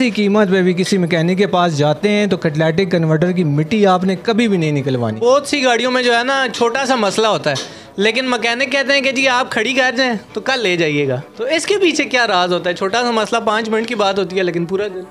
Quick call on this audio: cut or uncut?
cut